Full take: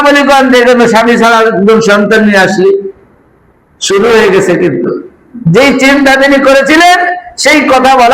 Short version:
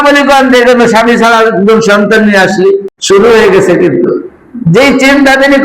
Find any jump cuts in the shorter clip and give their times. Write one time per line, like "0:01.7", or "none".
0:02.9